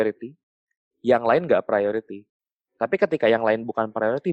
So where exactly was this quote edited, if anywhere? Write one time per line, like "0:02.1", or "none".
none